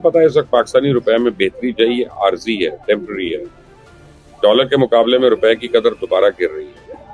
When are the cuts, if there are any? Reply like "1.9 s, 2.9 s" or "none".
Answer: none